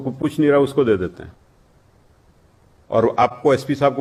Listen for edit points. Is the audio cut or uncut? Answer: uncut